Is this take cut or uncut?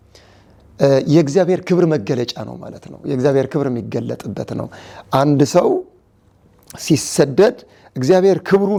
uncut